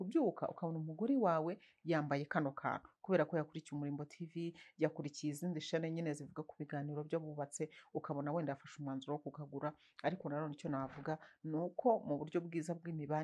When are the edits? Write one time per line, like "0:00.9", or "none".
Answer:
none